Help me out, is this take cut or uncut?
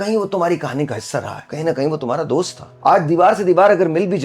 cut